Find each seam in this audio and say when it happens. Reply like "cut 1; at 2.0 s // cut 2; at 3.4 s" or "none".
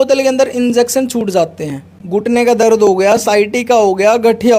cut 1; at 2.0 s